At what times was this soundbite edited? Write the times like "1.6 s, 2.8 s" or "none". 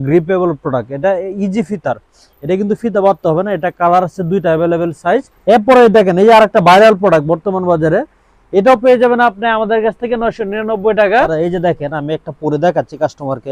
5.3 s, 11.3 s

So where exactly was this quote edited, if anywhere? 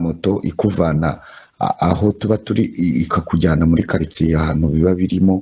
none

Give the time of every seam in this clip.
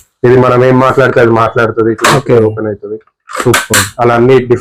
none

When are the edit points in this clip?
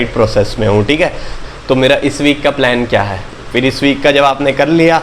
1.4 s

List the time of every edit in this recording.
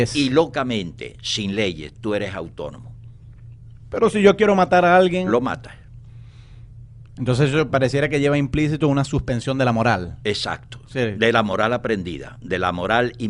6.1 s

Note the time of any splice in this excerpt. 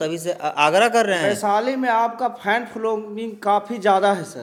none

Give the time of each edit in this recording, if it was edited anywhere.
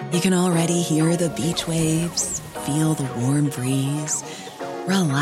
none

